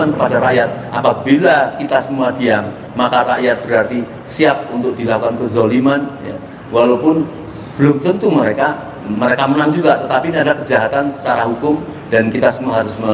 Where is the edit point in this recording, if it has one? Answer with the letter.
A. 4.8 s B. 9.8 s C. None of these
C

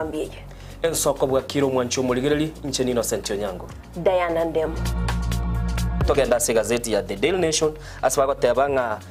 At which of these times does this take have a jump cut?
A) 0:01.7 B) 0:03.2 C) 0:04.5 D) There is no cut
D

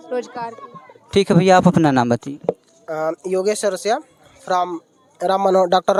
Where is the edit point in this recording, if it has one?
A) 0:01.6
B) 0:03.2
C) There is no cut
C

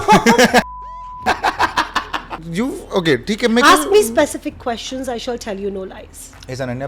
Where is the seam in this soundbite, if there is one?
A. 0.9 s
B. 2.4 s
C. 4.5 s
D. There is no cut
B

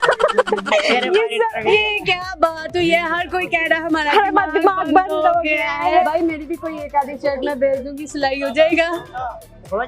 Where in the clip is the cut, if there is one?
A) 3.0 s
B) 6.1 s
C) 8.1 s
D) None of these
B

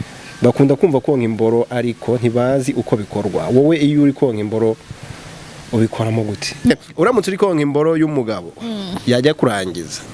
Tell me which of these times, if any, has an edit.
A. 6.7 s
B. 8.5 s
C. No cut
A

